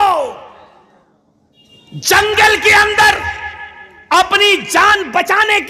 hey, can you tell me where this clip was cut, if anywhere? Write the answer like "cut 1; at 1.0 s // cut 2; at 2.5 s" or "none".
none